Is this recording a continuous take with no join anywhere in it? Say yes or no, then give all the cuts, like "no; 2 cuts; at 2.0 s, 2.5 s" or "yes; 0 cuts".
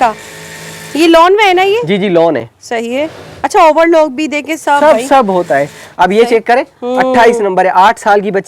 yes; 0 cuts